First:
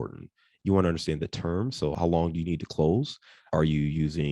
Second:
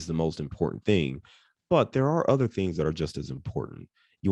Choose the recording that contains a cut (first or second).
first